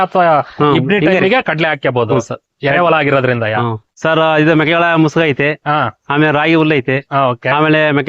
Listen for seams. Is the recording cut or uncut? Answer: cut